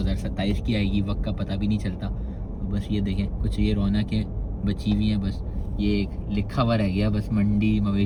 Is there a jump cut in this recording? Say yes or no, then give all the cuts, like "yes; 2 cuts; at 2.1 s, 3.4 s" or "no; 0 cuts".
no; 0 cuts